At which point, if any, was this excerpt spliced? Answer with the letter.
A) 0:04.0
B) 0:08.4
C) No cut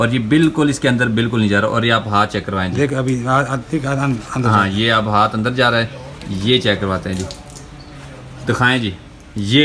C